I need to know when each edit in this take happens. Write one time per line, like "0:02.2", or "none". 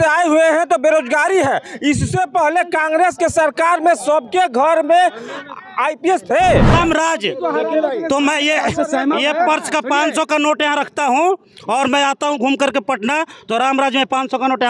0:06.7